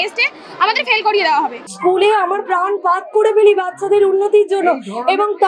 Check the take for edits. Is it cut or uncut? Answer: cut